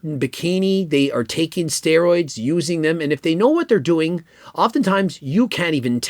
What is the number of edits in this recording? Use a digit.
0